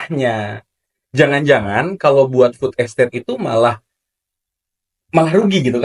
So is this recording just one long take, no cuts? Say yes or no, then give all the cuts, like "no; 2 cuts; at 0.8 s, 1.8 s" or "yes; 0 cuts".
yes; 0 cuts